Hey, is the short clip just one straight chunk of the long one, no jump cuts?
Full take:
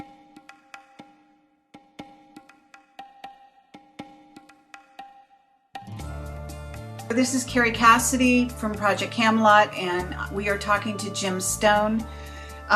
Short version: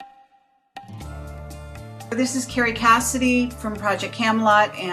yes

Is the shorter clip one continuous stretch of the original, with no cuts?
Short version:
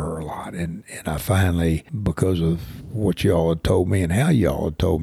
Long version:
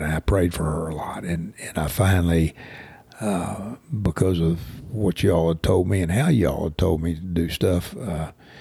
no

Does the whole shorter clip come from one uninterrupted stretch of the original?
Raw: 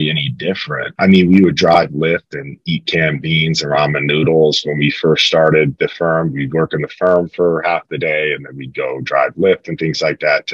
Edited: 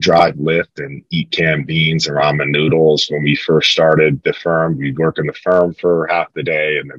yes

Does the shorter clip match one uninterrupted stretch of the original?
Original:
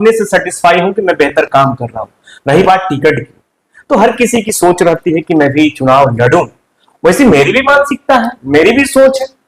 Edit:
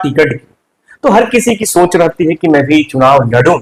yes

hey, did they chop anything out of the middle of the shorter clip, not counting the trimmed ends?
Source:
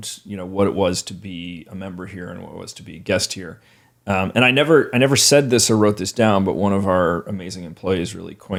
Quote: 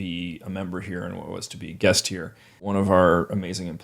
yes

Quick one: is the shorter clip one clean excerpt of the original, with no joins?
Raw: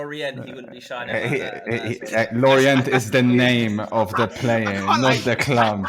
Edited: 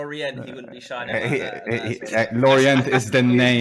yes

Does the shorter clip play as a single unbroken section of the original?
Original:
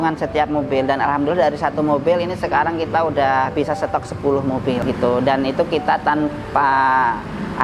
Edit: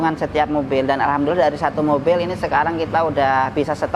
yes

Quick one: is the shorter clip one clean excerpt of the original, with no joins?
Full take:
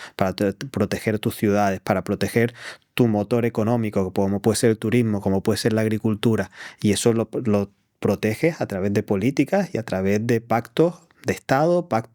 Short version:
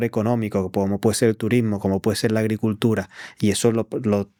yes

